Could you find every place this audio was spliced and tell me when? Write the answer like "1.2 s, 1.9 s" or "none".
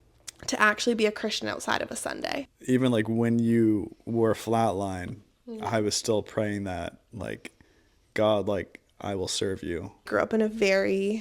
2.5 s, 10.1 s